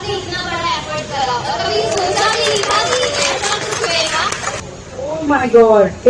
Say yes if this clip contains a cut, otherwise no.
yes